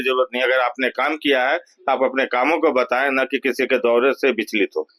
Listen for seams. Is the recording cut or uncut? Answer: uncut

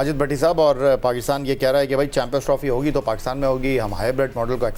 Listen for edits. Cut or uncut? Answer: uncut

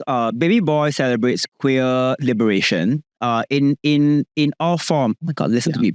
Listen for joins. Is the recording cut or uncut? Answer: uncut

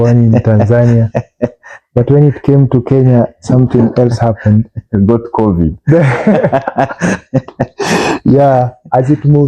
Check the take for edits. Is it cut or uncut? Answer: uncut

